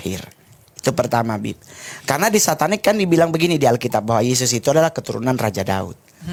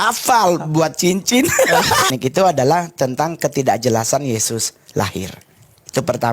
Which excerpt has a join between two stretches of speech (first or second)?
second